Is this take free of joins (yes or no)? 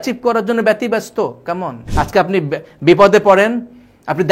no